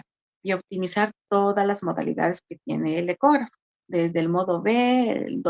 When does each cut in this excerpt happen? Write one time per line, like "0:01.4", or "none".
none